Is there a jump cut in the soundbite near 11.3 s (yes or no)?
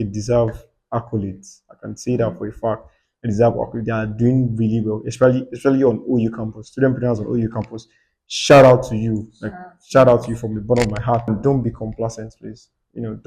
yes